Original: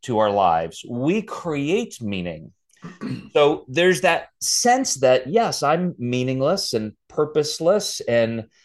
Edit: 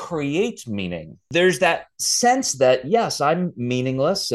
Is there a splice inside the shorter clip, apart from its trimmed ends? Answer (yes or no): yes